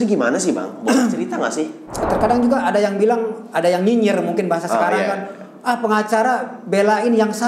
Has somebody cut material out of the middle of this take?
yes; 1 cut; at 2.1 s

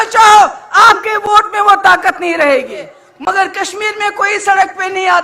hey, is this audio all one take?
no; 1 cut; at 3.0 s

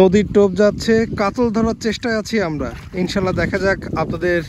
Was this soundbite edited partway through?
no; 0 cuts

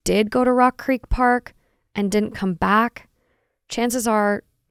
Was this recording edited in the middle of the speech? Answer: no; 0 cuts

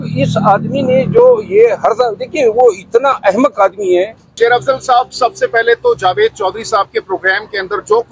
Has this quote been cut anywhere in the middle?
yes; 1 cut; at 4.2 s

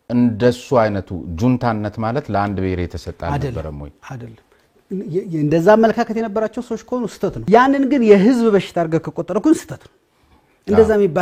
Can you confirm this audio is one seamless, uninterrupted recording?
no; 1 cut; at 7.4 s

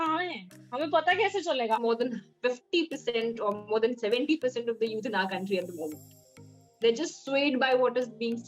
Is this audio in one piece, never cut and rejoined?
no; 1 cut; at 1.8 s

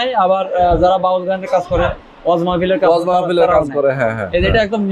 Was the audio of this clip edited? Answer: no; 0 cuts

